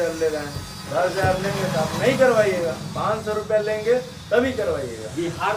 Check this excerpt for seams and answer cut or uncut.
uncut